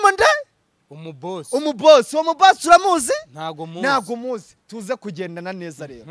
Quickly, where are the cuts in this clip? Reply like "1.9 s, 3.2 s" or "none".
none